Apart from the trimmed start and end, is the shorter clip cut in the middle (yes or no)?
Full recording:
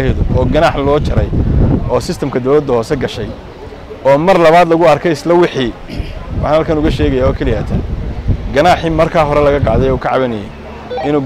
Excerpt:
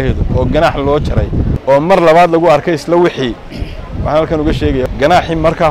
yes